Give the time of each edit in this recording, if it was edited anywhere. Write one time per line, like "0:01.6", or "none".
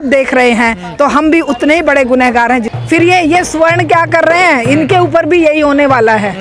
0:02.7